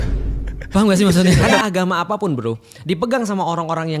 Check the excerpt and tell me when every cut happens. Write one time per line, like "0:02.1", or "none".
0:01.6